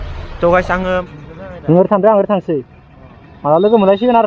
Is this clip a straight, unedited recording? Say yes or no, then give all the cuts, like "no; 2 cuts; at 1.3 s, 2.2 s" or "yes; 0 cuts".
no; 1 cut; at 1.1 s